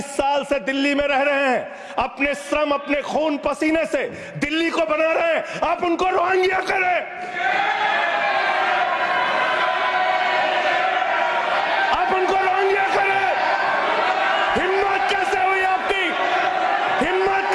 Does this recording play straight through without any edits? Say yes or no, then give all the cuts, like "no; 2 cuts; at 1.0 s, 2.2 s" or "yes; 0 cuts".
yes; 0 cuts